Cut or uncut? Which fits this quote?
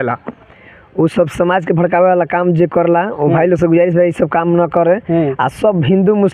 uncut